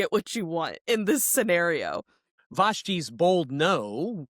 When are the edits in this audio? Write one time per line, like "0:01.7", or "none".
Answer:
0:02.4

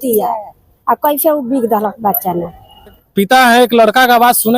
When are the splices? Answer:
0:03.0

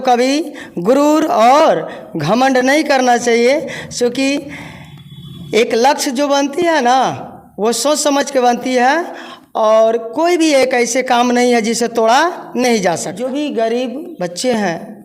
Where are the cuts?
0:13.1

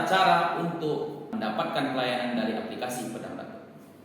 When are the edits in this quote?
0:01.3

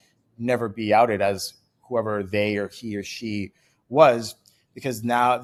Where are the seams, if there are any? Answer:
none

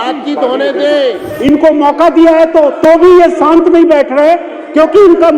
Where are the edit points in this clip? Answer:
0:01.3

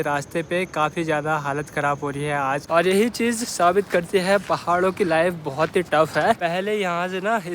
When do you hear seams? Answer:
0:02.7
0:06.4

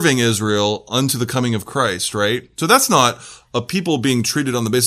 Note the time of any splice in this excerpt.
none

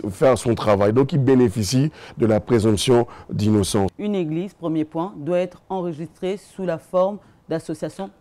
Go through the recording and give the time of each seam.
0:03.9

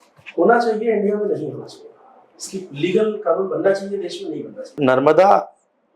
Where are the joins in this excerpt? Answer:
0:04.8

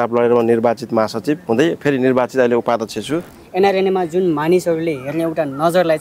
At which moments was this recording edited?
0:03.4

